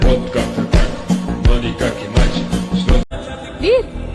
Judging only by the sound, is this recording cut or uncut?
cut